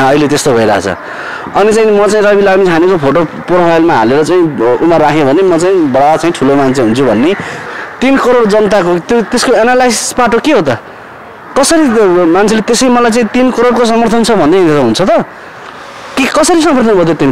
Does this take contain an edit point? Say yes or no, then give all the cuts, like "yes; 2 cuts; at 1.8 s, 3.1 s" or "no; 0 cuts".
yes; 1 cut; at 7.7 s